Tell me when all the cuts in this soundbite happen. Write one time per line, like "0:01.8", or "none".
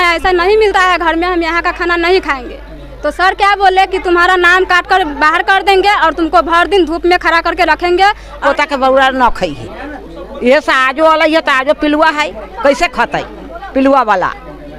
0:08.4